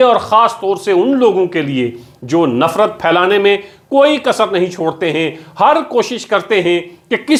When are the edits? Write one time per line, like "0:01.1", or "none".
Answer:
none